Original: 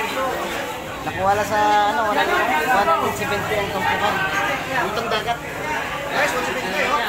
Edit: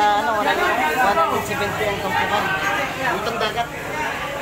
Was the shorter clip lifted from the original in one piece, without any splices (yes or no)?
yes